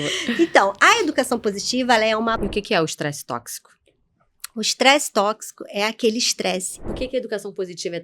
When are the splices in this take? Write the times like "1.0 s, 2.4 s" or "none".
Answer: 2.4 s, 6.8 s